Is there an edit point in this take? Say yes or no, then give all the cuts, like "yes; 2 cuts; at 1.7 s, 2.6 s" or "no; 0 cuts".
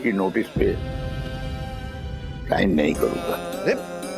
yes; 3 cuts; at 0.8 s, 2.4 s, 3.3 s